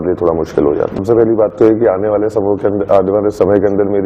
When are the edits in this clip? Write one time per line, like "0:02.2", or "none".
0:01.0